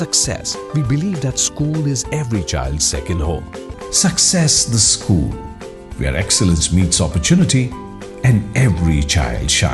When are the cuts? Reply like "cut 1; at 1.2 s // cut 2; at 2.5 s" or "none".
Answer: cut 1; at 3.7 s

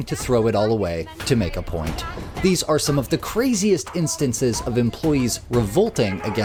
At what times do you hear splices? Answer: none

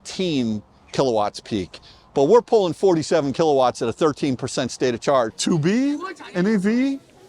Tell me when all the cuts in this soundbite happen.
cut 1; at 5.3 s

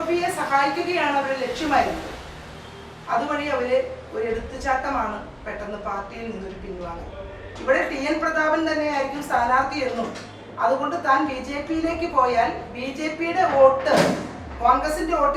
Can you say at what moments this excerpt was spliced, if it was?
cut 1; at 7.4 s

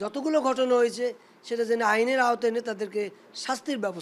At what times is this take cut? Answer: none

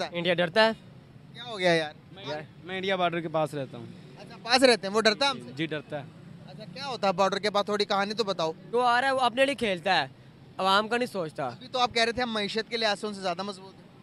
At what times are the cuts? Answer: cut 1; at 8.6 s

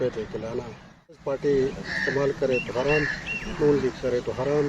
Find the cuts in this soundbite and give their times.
cut 1; at 1.2 s

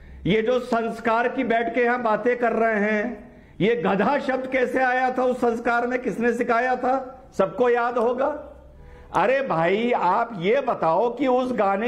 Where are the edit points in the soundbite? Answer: none

